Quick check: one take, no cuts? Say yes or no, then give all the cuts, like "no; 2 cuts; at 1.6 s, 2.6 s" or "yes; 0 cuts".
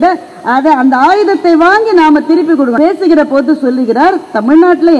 no; 1 cut; at 2.7 s